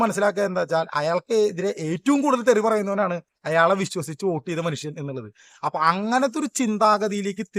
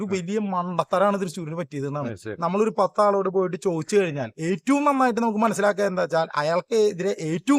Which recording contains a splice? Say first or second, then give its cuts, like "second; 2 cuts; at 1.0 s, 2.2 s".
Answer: second; 1 cut; at 2.3 s